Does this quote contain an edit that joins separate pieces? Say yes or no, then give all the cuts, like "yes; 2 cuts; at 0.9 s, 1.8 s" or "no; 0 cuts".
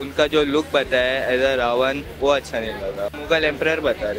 yes; 1 cut; at 3.1 s